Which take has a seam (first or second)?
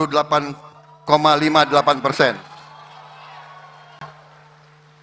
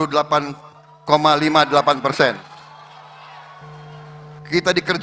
second